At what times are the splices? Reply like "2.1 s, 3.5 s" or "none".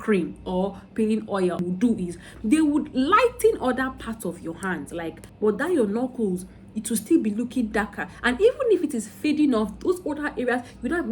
1.6 s, 5.2 s

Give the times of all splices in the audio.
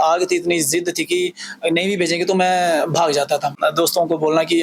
3.6 s

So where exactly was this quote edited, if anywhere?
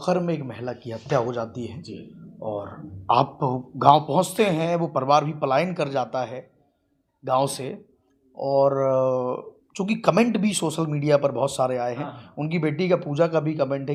none

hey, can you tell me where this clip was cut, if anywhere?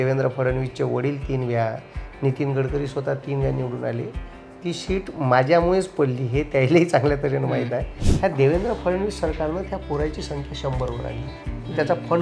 8.0 s

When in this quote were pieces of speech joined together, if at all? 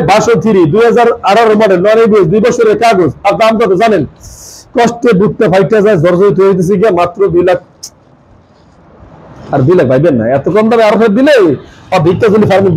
none

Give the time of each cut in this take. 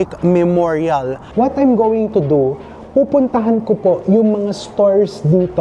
1.2 s

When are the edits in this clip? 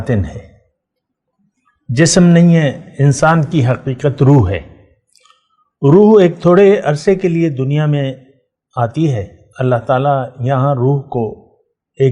none

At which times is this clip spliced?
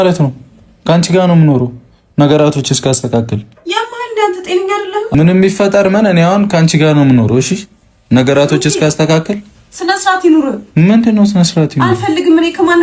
5.1 s

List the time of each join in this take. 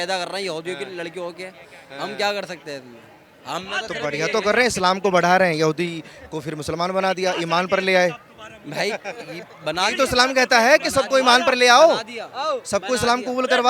none

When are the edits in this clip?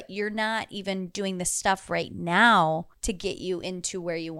none

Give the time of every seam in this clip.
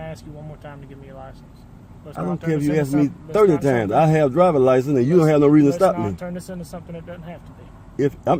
none

